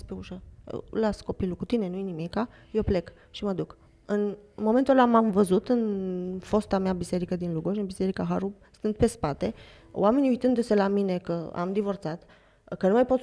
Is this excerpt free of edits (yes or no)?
yes